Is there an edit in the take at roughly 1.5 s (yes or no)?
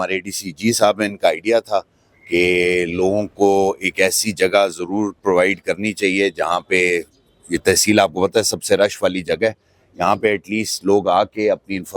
no